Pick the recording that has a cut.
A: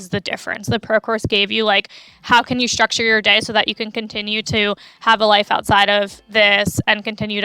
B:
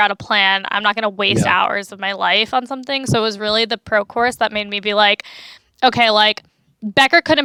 A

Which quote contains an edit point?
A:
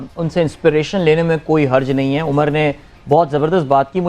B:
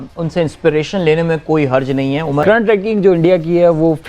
B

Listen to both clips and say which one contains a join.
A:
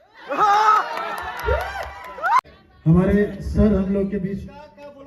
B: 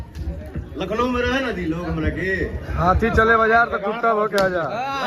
A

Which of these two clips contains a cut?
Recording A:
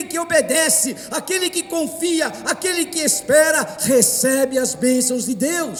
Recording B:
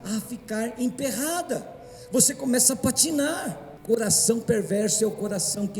B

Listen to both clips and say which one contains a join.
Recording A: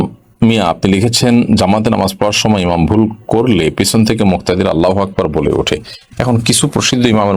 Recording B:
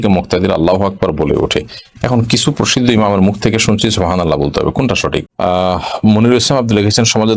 B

